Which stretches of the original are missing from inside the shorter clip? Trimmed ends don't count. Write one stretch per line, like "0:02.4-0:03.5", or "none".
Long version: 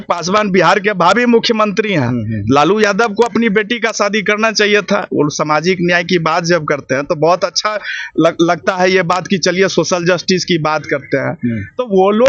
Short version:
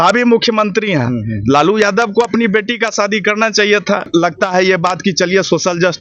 0:05.1-0:08.3